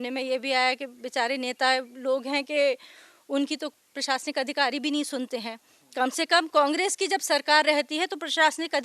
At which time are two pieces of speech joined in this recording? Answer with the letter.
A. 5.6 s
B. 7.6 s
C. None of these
C